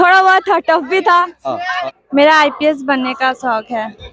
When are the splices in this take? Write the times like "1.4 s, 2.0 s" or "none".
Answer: 1.8 s